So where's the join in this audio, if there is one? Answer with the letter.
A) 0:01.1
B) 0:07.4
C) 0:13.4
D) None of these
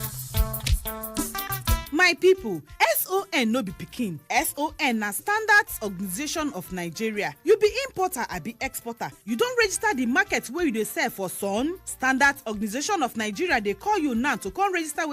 A